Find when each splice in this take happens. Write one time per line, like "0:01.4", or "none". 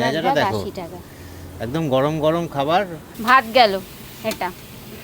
0:03.1

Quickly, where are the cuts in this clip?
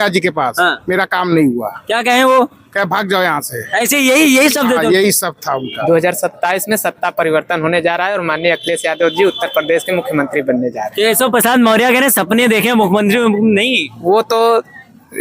0:05.6

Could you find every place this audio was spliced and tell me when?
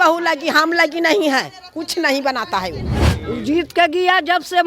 0:03.1

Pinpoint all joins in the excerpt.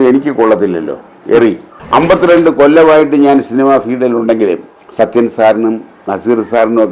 0:01.7
0:04.8

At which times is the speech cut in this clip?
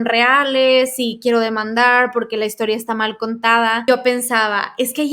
0:03.8

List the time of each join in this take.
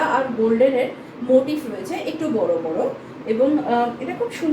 none

